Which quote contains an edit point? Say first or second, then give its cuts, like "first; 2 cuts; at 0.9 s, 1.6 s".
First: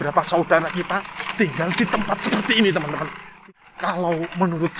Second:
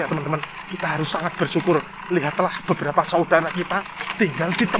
first; 1 cut; at 3.3 s